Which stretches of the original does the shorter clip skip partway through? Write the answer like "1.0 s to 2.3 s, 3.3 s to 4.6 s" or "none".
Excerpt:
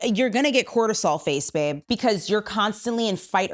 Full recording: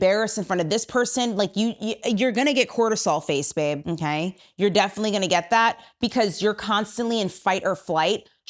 3.8 s to 5.9 s